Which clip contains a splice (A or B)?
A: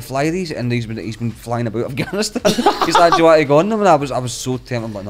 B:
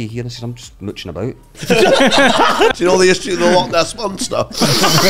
B